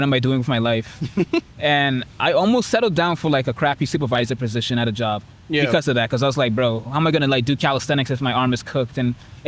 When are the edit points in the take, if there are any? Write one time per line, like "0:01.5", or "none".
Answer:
none